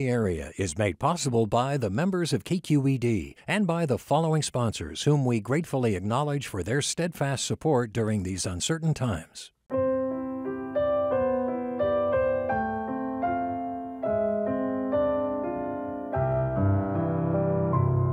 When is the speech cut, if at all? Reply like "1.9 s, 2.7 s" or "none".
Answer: 9.6 s